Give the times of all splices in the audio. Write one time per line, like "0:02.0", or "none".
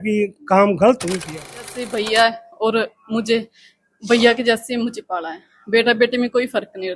0:01.8